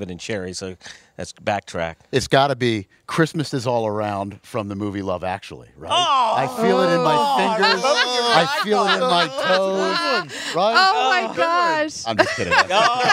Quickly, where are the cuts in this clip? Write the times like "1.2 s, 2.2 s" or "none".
2.0 s